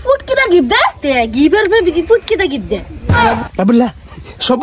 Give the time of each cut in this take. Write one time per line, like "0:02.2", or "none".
0:02.9